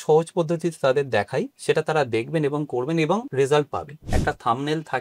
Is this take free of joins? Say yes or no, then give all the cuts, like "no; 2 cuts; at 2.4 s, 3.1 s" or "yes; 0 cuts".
no; 3 cuts; at 1.5 s, 3.3 s, 4.0 s